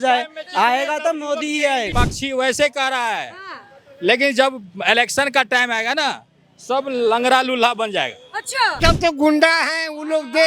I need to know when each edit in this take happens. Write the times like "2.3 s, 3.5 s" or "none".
1.9 s, 8.8 s